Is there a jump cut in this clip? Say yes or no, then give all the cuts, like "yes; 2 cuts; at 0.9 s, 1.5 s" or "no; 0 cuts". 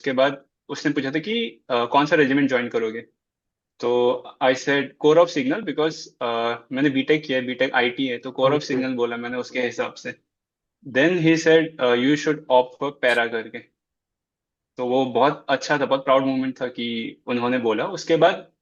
no; 0 cuts